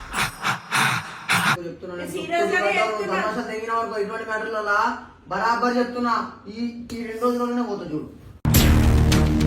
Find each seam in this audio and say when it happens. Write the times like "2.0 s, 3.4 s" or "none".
1.6 s